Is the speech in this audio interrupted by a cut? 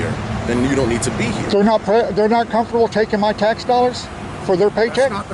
no; 0 cuts

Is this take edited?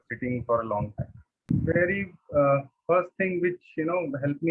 yes; 1 cut; at 1.5 s

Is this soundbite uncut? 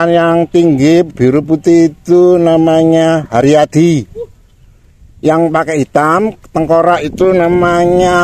yes; 0 cuts

